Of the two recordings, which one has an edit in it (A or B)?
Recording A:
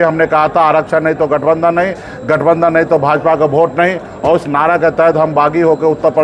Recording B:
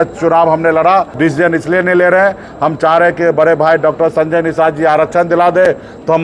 B